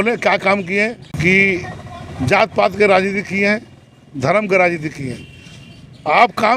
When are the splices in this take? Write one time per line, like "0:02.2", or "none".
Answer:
0:01.0